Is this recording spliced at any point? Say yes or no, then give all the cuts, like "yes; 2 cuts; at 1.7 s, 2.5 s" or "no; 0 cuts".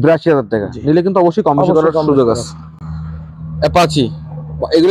no; 0 cuts